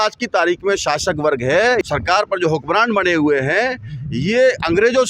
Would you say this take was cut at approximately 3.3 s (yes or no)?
no